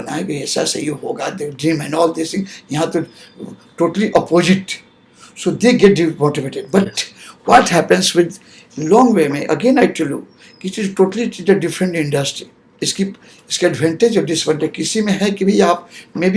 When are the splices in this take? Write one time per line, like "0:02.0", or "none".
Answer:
none